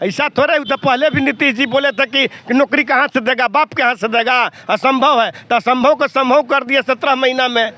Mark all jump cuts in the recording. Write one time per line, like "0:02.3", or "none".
none